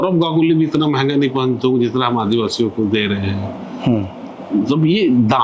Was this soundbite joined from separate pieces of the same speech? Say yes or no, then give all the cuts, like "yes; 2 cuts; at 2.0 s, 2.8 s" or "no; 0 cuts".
no; 0 cuts